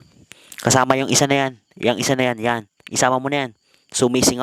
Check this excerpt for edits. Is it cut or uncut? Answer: uncut